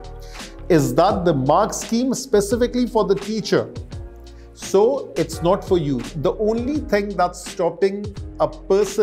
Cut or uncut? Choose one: cut